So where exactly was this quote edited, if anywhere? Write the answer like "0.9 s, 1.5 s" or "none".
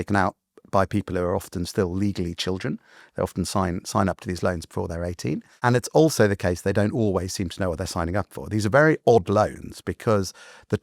5.5 s